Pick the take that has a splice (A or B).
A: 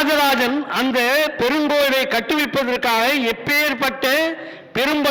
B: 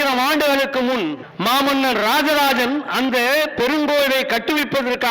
B